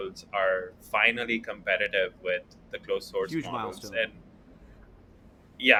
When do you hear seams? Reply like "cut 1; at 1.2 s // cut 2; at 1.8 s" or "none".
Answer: none